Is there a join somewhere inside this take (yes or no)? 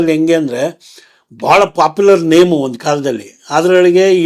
no